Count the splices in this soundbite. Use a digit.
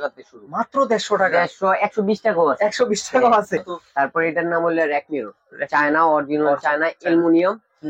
1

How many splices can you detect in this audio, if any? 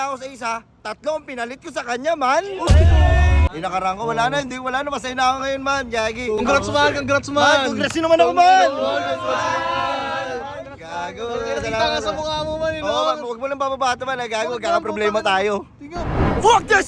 2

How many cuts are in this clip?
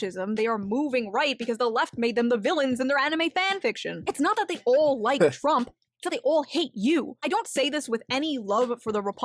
1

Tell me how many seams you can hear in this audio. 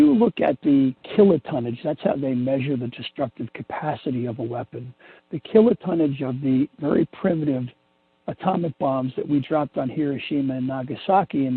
1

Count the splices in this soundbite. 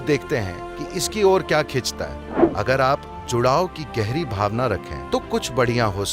1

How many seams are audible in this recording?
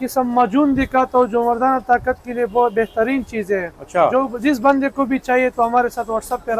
0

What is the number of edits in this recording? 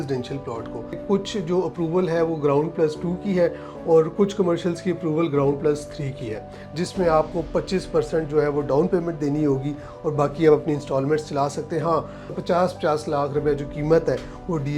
3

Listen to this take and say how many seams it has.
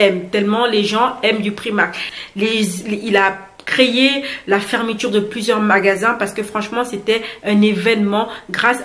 1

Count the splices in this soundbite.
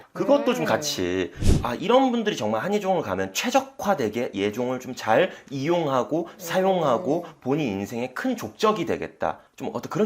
1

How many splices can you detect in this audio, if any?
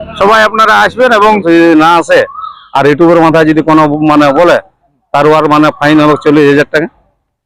1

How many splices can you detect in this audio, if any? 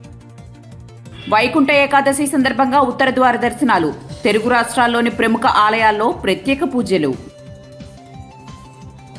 0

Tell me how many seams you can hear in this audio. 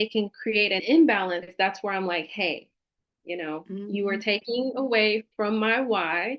2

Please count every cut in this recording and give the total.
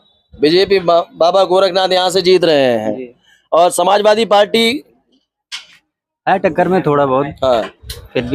0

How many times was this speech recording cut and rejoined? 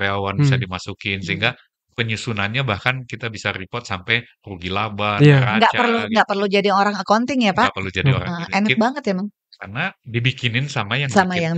0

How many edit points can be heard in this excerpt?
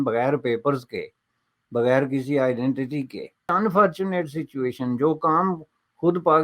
1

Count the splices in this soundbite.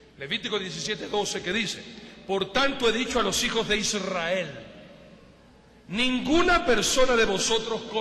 0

